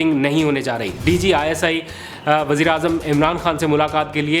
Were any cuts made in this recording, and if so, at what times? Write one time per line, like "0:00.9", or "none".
0:00.9